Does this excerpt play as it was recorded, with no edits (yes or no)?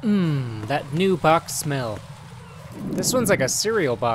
yes